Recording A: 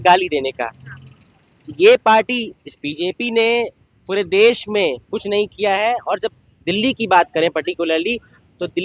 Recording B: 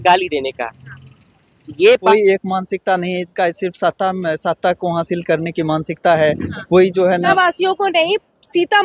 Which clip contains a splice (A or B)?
B